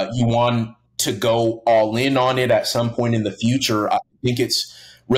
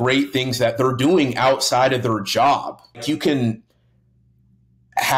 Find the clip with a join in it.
second; 1 cut; at 3.0 s

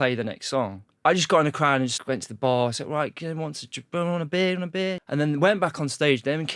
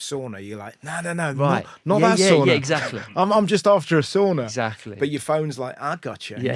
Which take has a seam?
first; 3 cuts; at 0.9 s, 1.9 s, 5.0 s

